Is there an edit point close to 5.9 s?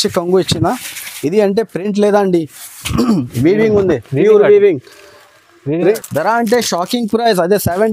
yes; 1 cut; at 5.9 s

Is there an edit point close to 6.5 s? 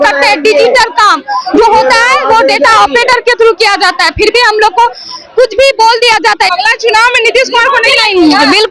yes; 1 cut; at 6.5 s

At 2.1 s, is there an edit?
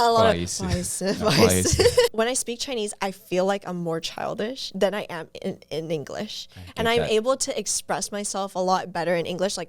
yes; 1 cut; at 2.1 s

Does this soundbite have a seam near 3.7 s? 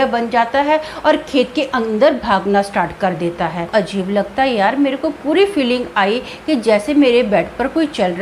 yes; 1 cut; at 3.7 s

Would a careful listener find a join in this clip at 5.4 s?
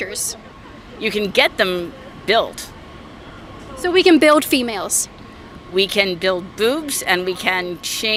no; 0 cuts

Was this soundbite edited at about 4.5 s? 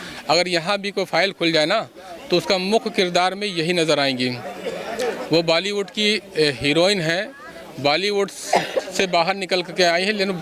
no; 0 cuts

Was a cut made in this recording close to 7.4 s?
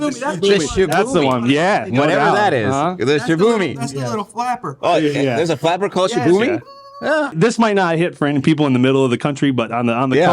yes; 1 cut; at 7.4 s

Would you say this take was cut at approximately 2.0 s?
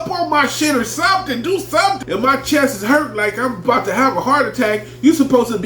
yes; 1 cut; at 2.0 s

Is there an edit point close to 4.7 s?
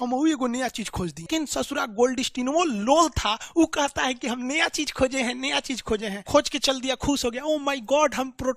no; 2 cuts; at 1.3 s, 6.2 s

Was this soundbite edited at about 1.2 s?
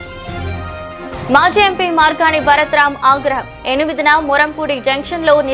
yes; 1 cut; at 1.2 s

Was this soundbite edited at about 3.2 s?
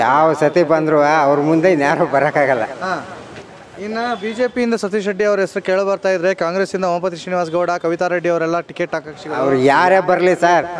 no; 0 cuts

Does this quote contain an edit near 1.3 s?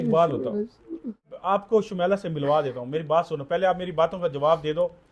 yes; 1 cut; at 1.3 s

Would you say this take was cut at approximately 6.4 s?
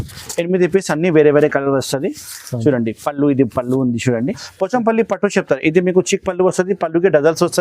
no; 1 cut; at 4.5 s

